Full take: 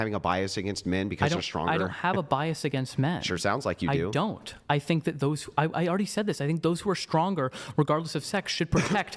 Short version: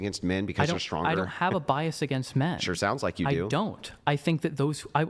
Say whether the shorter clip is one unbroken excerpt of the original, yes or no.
yes